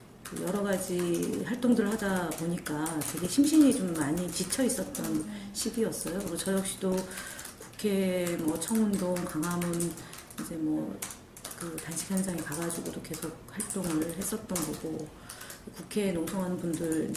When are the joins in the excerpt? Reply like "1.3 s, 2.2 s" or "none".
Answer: none